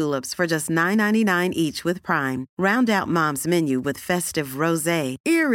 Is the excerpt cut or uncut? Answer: uncut